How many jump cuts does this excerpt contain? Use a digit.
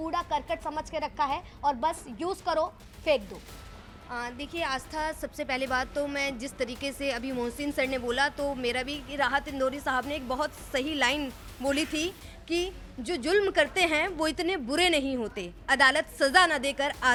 0